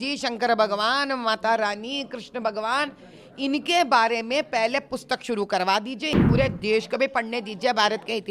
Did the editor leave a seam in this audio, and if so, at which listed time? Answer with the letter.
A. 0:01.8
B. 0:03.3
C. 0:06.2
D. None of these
C